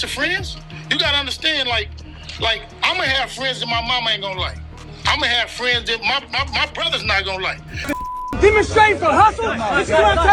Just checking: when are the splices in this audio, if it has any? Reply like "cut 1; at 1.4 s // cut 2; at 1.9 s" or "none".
cut 1; at 7.7 s